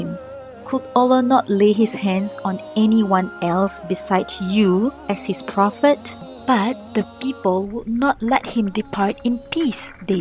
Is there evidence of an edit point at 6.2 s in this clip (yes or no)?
yes